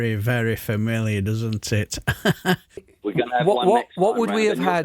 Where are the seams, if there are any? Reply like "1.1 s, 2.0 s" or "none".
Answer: 2.9 s